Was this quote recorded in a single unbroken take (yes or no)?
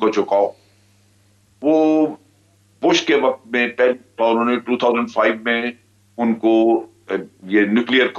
yes